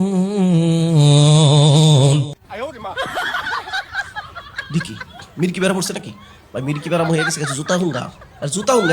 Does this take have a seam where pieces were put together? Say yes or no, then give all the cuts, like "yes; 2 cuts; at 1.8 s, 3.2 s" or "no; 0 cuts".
yes; 1 cut; at 2.4 s